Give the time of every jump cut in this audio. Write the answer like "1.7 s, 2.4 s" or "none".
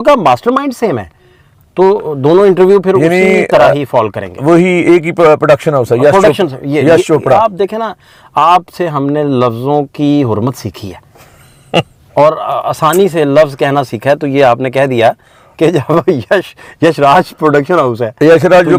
none